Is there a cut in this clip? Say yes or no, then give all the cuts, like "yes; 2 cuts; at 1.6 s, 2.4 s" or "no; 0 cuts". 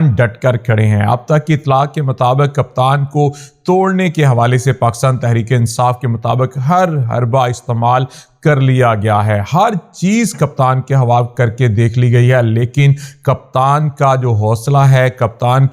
no; 0 cuts